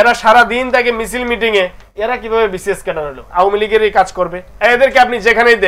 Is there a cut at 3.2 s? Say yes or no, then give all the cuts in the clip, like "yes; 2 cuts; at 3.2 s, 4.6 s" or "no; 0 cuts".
yes; 1 cut; at 3.2 s